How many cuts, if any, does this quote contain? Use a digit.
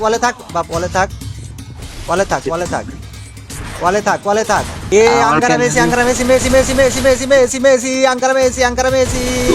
1